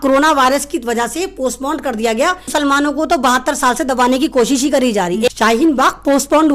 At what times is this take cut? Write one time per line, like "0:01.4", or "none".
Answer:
0:02.5
0:05.3